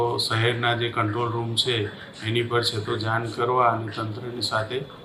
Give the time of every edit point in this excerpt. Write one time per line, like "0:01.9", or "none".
none